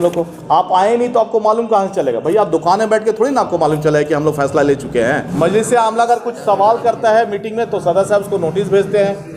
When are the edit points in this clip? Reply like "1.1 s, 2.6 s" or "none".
5.3 s